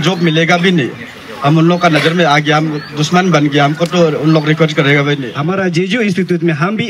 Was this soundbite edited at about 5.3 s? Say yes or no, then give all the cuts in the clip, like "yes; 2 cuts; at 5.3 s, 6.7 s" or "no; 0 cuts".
yes; 1 cut; at 5.3 s